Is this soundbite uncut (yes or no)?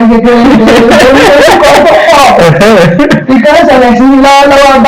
yes